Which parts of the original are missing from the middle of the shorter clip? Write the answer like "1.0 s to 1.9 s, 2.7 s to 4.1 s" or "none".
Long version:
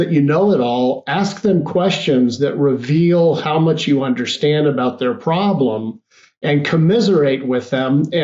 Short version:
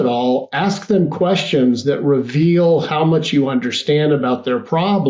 none

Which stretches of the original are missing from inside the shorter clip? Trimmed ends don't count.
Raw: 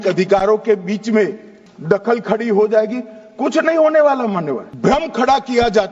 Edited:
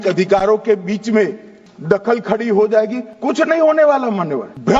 3.1 s to 3.2 s

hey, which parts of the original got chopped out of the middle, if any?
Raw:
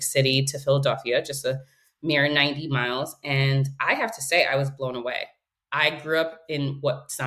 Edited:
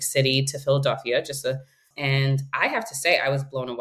1.9 s to 3.2 s

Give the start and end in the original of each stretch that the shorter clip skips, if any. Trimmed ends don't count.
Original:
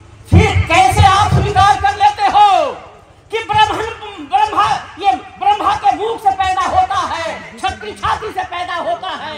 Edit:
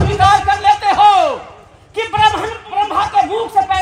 4.0 s to 5.3 s

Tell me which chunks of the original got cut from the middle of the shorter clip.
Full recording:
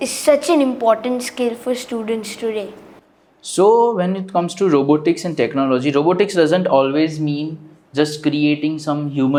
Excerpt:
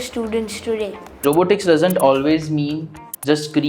3.0 s to 5.9 s

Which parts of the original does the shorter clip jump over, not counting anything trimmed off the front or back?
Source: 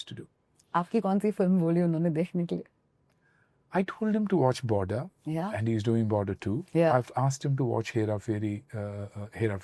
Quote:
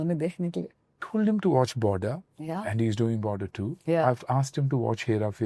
3.0 s to 3.9 s

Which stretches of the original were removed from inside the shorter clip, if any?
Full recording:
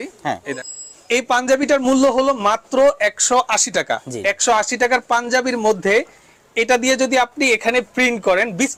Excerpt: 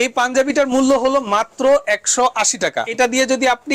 4.0 s to 6.5 s

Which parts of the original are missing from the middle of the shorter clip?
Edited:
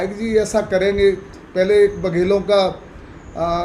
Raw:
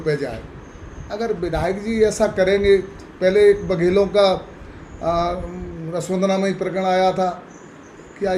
none

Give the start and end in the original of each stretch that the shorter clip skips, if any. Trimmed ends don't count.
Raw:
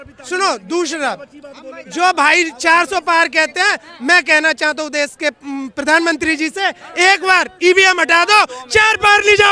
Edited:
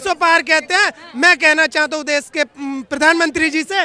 none

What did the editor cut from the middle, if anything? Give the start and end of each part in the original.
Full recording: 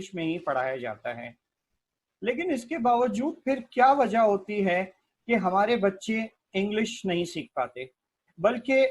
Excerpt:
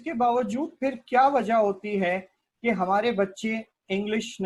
none

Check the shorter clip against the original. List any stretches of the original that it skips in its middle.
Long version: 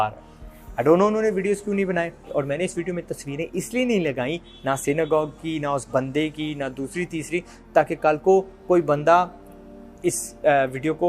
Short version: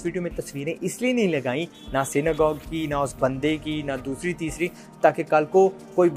none

